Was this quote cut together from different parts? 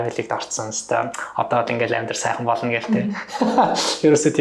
no; 0 cuts

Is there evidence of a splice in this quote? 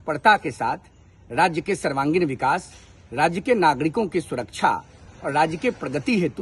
no; 0 cuts

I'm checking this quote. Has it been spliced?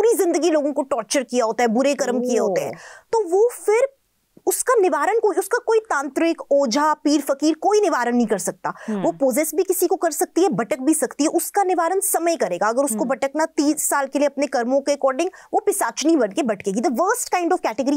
no; 0 cuts

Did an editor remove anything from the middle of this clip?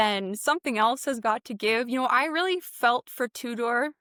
no; 0 cuts

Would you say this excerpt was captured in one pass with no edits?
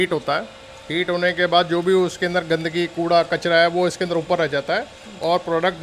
yes; 0 cuts

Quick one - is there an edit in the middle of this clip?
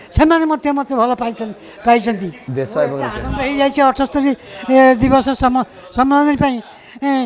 yes; 1 cut; at 2.4 s

